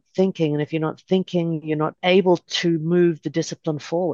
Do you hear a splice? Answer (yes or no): yes